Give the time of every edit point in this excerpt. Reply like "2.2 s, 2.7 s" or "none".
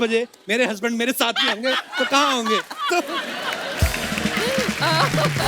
none